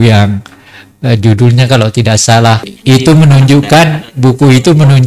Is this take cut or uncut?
cut